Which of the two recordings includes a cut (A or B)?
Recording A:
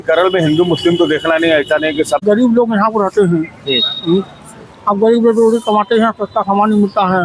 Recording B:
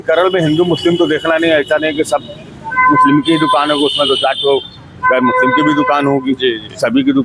A